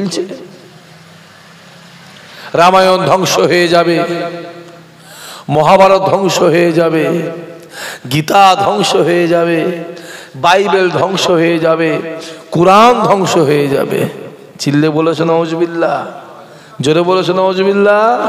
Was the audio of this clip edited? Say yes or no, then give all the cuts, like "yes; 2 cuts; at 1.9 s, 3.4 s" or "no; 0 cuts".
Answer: no; 0 cuts